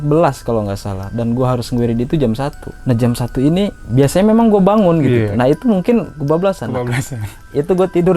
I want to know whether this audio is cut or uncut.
cut